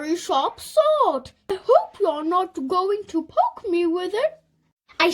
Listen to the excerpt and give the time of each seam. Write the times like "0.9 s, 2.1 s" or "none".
1.5 s